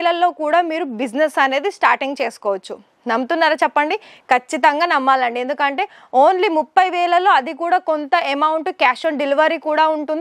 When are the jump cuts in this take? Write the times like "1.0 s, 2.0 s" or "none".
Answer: none